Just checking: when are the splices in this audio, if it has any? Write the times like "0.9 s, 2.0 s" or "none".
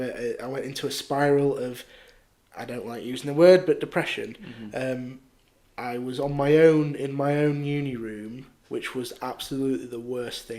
none